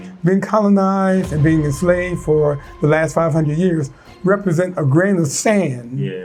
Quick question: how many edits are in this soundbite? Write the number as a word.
zero